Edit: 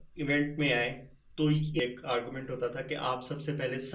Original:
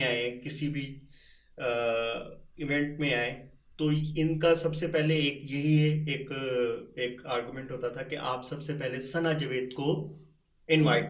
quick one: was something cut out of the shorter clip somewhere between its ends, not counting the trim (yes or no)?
yes